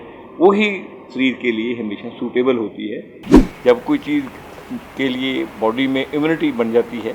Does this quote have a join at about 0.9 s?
no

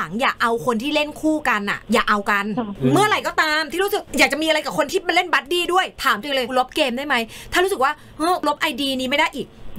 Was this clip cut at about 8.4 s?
yes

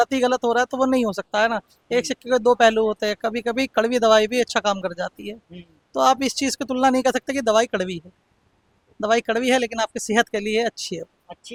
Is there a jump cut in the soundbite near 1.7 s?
no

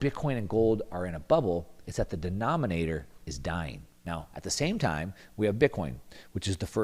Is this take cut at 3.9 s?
yes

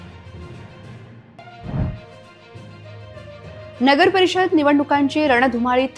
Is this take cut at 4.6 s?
no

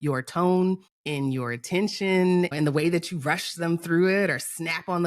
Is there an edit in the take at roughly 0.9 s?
yes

